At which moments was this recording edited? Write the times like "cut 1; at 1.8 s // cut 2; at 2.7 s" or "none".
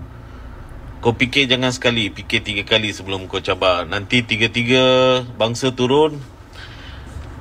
none

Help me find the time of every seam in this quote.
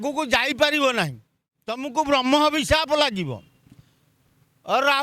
cut 1; at 1.8 s

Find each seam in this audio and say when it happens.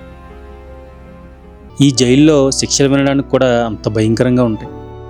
cut 1; at 1.7 s

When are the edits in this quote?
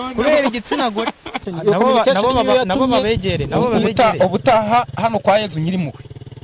cut 1; at 1.5 s

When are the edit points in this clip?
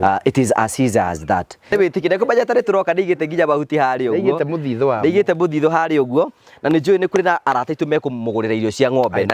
cut 1; at 1.7 s

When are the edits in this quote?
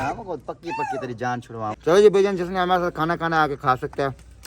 cut 1; at 1.7 s

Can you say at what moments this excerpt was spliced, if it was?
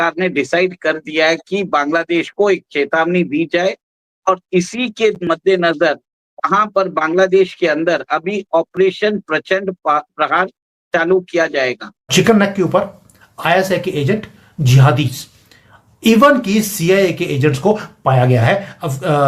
cut 1; at 12.1 s

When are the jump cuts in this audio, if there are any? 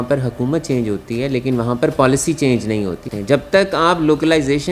cut 1; at 3.0 s

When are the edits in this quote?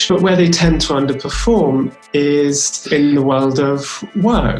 cut 1; at 2.8 s

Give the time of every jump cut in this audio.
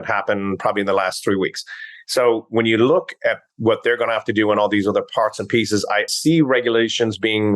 cut 1; at 6.1 s

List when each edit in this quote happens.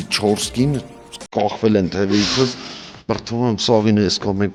none

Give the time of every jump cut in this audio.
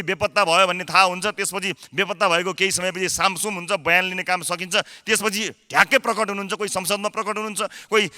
none

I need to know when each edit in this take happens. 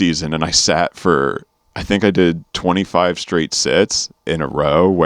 cut 1; at 4.1 s

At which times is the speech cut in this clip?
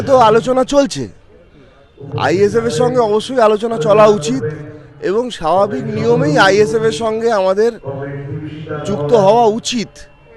none

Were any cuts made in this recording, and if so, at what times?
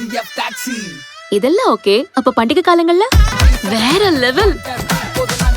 cut 1; at 3.4 s

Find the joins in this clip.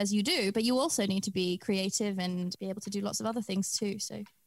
cut 1; at 2.5 s

